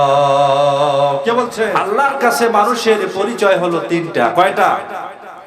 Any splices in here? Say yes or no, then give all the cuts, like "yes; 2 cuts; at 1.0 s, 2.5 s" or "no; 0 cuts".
yes; 1 cut; at 1.8 s